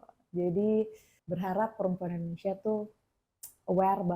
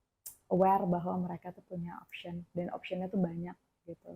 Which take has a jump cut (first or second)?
first